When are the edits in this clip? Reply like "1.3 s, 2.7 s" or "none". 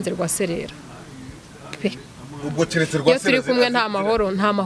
none